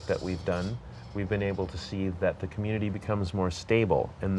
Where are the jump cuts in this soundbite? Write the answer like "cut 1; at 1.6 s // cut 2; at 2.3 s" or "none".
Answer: none